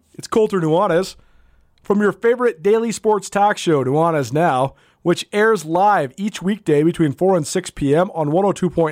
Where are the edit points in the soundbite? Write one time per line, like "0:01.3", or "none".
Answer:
none